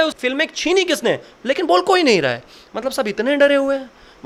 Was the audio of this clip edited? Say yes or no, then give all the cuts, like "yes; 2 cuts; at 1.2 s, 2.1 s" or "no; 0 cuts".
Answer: no; 0 cuts